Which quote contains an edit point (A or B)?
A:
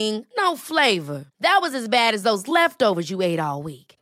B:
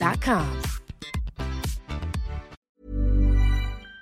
B